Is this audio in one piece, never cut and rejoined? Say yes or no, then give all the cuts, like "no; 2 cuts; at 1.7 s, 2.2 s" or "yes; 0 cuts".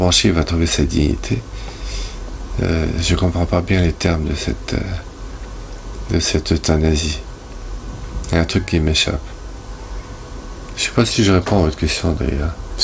yes; 0 cuts